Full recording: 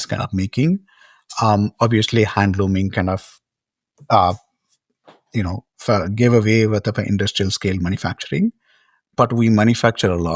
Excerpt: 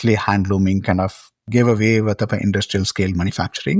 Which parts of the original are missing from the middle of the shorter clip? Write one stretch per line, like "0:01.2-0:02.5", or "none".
0:03.5-0:06.1